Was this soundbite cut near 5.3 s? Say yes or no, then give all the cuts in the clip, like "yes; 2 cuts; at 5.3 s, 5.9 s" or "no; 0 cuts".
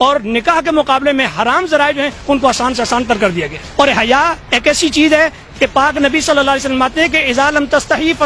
no; 1 cut; at 3.6 s